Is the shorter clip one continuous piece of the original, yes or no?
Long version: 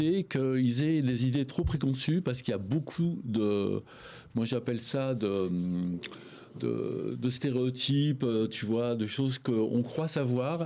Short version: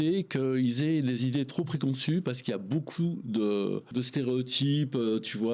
no